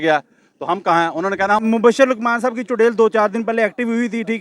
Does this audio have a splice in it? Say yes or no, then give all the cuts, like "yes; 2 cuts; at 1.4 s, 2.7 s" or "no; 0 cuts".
yes; 1 cut; at 1.6 s